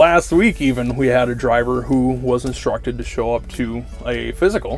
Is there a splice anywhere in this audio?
no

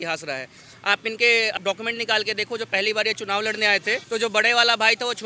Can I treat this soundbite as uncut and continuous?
no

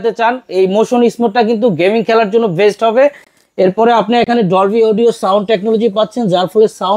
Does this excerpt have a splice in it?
no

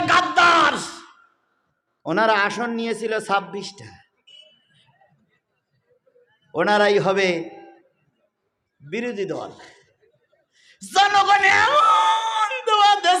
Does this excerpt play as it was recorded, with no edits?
yes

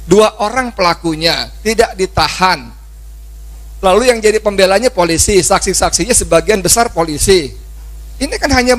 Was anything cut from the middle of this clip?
no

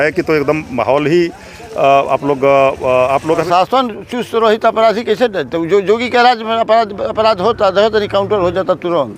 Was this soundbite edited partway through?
yes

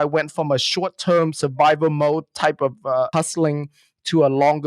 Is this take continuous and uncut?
no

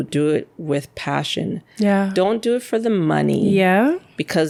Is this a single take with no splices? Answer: yes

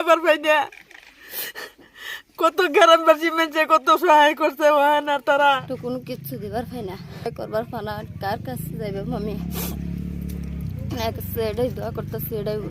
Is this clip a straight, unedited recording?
no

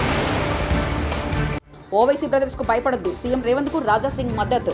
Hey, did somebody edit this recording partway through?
yes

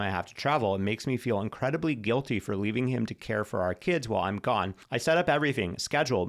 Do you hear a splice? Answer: yes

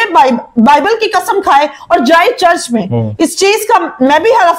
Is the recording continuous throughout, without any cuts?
yes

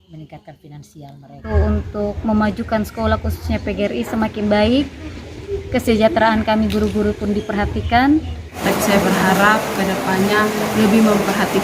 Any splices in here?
yes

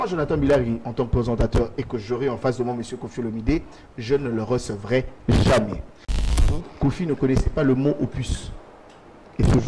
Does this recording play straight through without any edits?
no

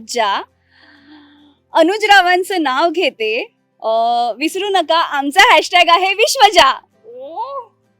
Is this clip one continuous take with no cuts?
yes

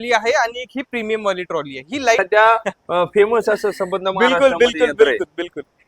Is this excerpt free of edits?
no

